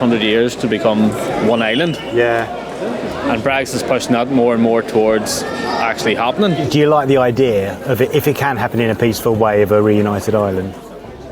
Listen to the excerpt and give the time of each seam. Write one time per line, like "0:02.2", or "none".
0:06.7